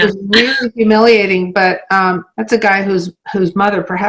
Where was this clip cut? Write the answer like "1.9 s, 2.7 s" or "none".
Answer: none